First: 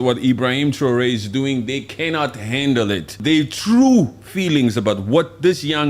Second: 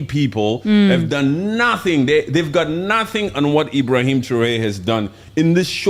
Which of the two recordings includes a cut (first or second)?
first